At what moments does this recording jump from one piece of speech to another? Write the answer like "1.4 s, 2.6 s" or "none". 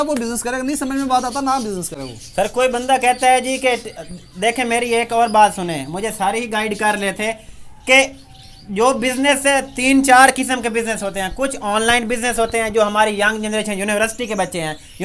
none